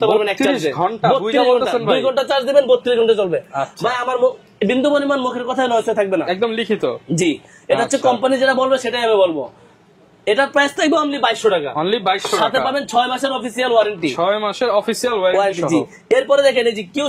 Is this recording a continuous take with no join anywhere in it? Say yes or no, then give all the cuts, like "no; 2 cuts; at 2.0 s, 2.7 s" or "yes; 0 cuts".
yes; 0 cuts